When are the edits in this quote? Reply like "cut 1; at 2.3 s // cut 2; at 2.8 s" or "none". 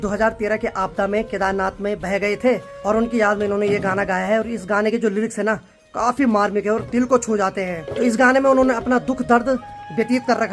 none